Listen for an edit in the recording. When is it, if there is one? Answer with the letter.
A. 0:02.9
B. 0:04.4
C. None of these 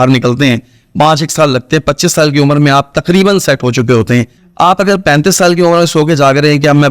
B